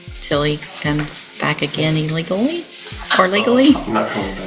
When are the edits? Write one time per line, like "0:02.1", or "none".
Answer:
none